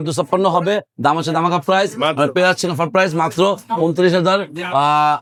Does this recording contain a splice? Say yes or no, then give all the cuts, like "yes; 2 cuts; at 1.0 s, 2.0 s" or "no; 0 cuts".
no; 0 cuts